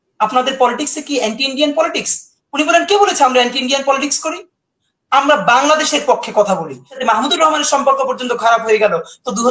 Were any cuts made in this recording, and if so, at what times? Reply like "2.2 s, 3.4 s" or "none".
7.0 s